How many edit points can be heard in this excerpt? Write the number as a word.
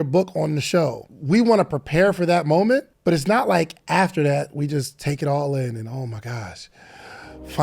two